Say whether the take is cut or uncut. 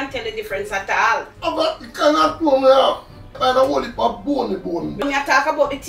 cut